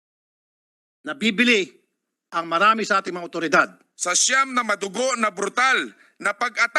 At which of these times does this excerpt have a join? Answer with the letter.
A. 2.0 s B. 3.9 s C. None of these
B